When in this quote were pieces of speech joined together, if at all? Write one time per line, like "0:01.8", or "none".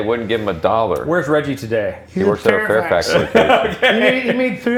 none